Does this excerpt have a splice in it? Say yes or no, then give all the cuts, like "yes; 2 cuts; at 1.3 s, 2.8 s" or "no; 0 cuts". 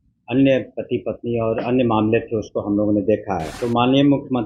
yes; 1 cut; at 3.5 s